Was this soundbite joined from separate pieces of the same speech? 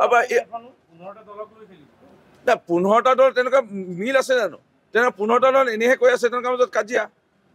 no; 0 cuts

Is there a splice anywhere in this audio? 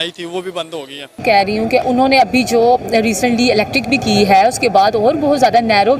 yes; 1 cut; at 1.0 s

